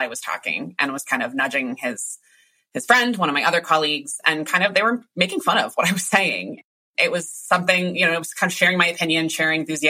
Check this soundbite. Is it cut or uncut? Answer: cut